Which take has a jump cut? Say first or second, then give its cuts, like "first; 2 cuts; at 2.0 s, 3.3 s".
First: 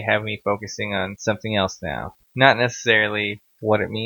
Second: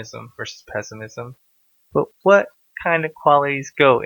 first; 2 cuts; at 1.1 s, 2.3 s